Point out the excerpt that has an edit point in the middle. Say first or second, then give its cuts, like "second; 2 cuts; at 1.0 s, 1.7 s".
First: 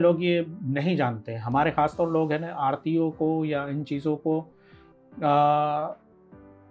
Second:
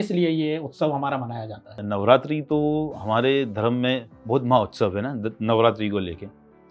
second; 2 cuts; at 1.8 s, 4.1 s